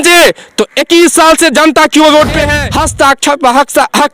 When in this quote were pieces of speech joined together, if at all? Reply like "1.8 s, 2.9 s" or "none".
2.6 s